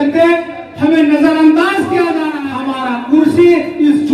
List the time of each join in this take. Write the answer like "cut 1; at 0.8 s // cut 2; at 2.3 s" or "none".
cut 1; at 2.4 s

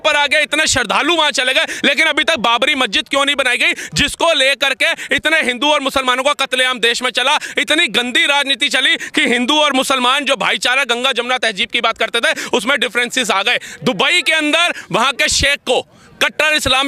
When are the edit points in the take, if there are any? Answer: none

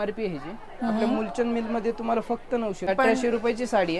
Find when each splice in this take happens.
cut 1; at 2.9 s

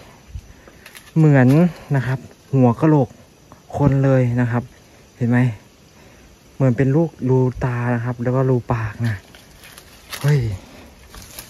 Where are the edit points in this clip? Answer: none

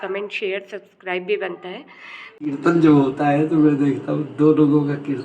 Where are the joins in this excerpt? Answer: cut 1; at 2.3 s

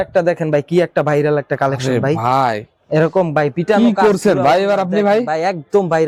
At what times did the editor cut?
none

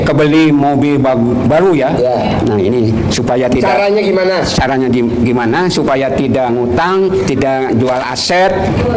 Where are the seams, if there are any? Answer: none

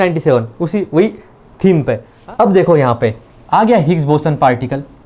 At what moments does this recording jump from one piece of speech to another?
cut 1; at 2.1 s

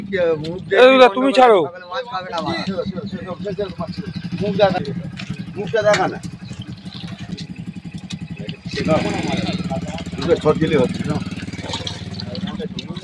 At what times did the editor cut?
cut 1; at 4.8 s // cut 2; at 7.3 s

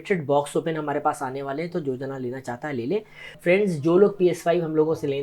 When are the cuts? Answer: cut 1; at 3.4 s

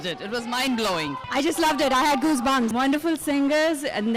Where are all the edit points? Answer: cut 1; at 1.2 s // cut 2; at 2.7 s

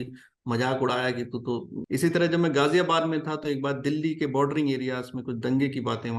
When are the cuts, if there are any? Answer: cut 1; at 1.8 s

